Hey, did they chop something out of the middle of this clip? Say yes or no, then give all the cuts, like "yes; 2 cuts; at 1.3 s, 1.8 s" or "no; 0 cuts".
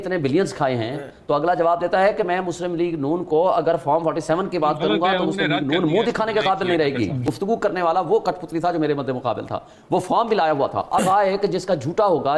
yes; 2 cuts; at 7.2 s, 11.0 s